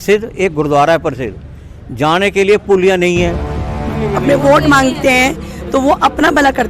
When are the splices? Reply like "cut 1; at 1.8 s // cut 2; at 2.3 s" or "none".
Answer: cut 1; at 3.9 s